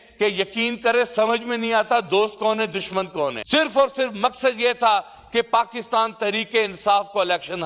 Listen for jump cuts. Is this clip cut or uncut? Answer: cut